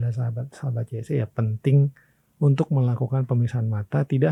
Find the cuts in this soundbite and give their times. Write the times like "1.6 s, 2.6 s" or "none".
none